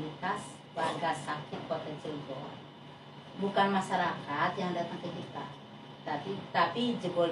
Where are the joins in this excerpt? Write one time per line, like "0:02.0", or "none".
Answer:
none